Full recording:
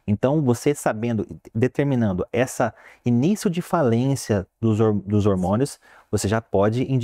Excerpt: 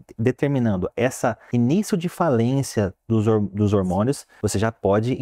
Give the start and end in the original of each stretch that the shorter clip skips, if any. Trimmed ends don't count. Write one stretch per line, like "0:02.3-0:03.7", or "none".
0:02.8-0:03.0
0:05.8-0:06.0